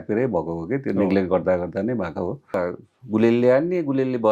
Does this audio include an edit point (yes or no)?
yes